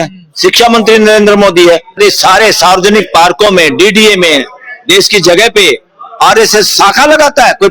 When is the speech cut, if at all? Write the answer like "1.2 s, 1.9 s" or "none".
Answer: 1.9 s